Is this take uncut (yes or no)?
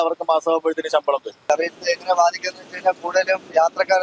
no